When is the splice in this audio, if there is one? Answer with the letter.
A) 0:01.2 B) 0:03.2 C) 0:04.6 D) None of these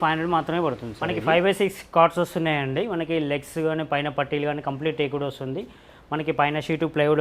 A